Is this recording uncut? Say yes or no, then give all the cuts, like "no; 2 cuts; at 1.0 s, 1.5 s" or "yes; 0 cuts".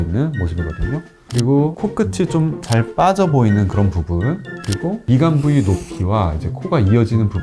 yes; 0 cuts